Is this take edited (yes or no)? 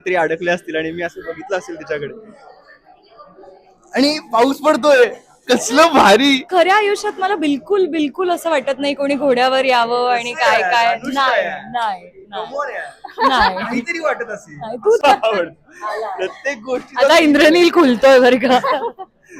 yes